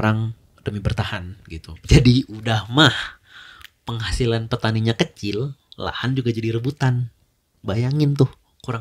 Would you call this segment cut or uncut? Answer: cut